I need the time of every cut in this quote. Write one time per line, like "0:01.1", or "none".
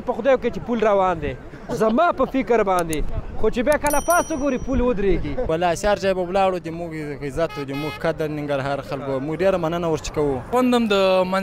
0:05.5
0:10.5